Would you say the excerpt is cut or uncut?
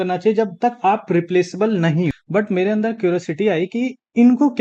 cut